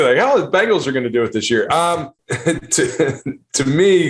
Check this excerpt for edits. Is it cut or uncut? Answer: cut